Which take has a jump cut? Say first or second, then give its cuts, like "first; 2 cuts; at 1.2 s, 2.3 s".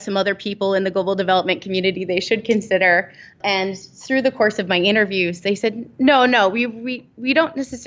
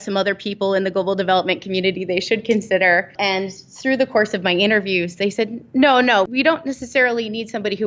second; 2 cuts; at 3.1 s, 6.3 s